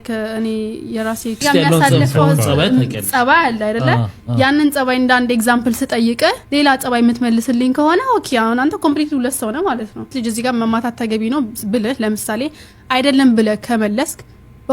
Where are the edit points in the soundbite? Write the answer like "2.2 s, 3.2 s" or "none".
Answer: 1.4 s, 10.1 s